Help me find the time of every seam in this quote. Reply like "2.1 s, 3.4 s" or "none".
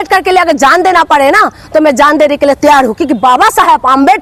none